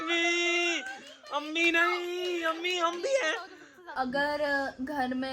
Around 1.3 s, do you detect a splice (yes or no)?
no